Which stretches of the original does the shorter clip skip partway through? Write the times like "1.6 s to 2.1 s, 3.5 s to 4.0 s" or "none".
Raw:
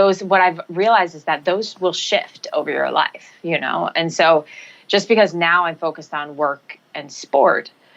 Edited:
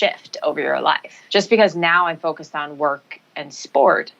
3.2 s to 4.7 s